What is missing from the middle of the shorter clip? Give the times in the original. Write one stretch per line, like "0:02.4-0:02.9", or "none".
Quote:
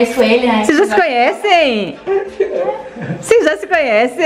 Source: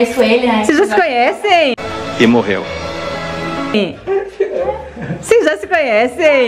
0:01.8-0:03.8